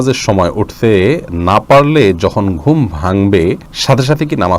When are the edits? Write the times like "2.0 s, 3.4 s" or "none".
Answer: 3.7 s